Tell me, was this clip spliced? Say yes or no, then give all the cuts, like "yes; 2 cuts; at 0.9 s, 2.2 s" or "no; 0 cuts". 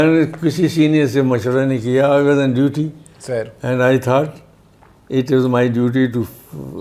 no; 0 cuts